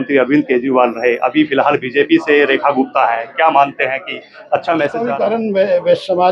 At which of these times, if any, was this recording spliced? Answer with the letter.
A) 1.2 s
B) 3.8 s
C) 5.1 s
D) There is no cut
C